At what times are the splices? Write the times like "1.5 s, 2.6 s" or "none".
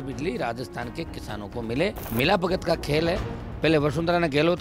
2.0 s